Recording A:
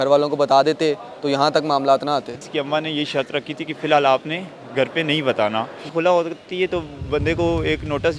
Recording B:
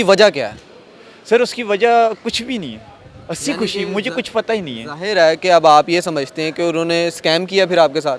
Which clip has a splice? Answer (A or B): A